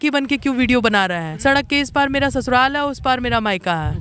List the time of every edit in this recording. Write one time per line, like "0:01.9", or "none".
0:01.4